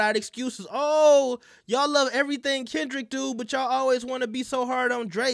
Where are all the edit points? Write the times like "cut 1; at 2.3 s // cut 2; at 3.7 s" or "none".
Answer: none